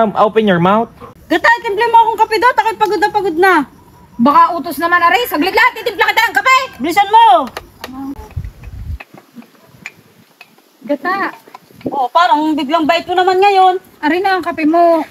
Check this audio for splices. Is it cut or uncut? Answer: cut